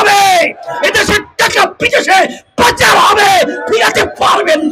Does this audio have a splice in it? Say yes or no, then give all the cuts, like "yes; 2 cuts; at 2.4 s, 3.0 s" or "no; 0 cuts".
no; 0 cuts